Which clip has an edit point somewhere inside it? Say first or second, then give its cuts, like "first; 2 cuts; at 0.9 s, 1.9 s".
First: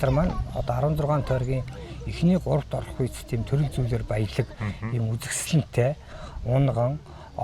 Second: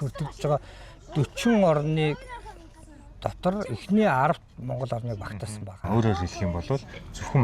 second; 1 cut; at 5.9 s